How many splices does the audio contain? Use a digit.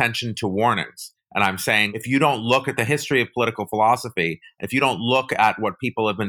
1